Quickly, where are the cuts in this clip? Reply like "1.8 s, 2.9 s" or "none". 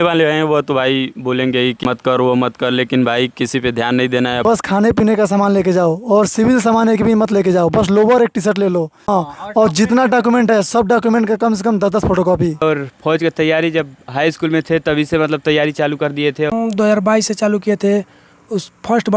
1.8 s, 4.4 s, 8.9 s, 12.6 s, 16.5 s